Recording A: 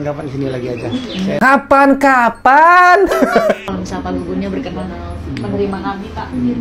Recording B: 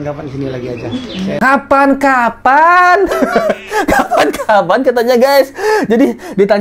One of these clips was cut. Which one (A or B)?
A